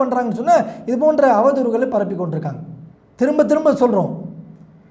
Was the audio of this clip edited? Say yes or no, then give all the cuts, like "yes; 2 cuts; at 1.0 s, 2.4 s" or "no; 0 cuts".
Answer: no; 0 cuts